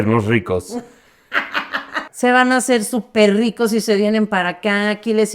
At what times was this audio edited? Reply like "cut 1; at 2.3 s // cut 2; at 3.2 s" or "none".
cut 1; at 2.0 s